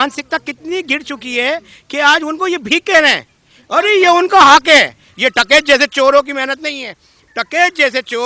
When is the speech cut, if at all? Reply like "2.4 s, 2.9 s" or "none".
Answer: 5.0 s

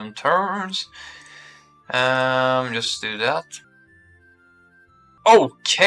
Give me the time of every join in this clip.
3.6 s, 5.2 s

